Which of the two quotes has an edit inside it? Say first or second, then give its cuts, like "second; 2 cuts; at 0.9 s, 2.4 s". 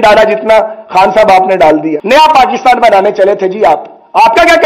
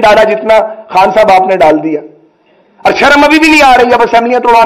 first; 1 cut; at 2.0 s